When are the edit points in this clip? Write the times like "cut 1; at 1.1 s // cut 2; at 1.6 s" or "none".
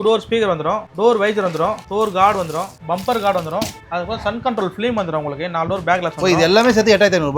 cut 1; at 0.9 s // cut 2; at 1.8 s // cut 3; at 2.7 s // cut 4; at 3.8 s

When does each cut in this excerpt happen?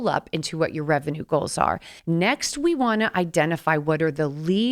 cut 1; at 1.9 s

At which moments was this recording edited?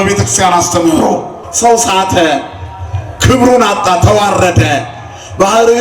cut 1; at 1.4 s

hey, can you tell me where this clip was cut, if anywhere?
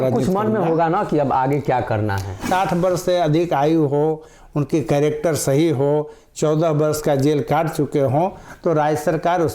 cut 1; at 2.5 s

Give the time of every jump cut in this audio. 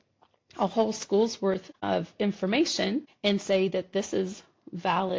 cut 1; at 1.7 s // cut 2; at 3.1 s

